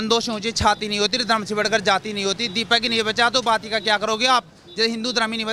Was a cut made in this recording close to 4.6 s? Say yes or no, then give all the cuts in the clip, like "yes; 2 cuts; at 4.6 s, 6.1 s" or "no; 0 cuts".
no; 0 cuts